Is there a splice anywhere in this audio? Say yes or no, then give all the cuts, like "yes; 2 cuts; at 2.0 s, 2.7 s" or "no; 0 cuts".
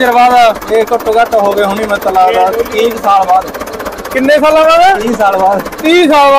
no; 0 cuts